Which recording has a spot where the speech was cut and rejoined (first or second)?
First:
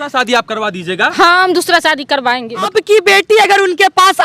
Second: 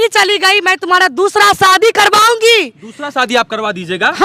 first